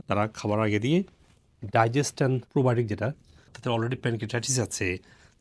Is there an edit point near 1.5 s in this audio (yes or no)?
no